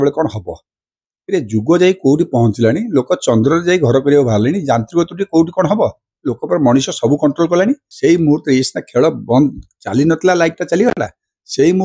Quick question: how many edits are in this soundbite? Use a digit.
1